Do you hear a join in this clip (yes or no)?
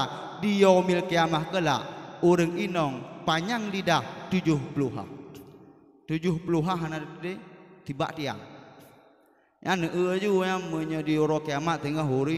no